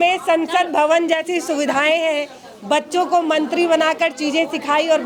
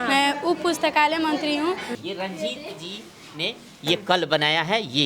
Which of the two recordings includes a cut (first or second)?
second